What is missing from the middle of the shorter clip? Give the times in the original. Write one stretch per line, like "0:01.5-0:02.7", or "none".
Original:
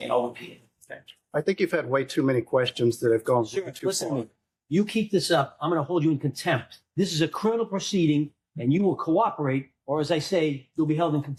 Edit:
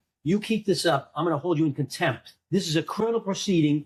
none